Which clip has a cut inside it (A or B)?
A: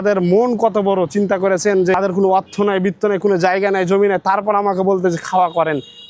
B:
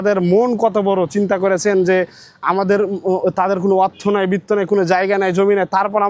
A